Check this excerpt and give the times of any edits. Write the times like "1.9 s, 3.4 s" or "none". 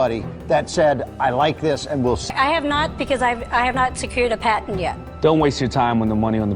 none